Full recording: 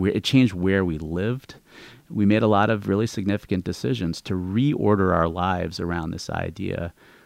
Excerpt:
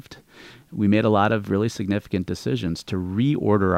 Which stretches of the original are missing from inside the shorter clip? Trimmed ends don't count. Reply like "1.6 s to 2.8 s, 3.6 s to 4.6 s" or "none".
none